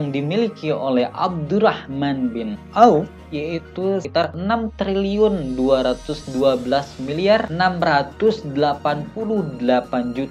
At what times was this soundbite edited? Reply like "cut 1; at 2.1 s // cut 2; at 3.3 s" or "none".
cut 1; at 4.2 s